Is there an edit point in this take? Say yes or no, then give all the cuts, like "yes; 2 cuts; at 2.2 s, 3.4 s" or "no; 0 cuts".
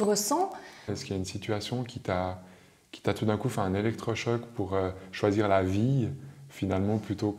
yes; 1 cut; at 1.0 s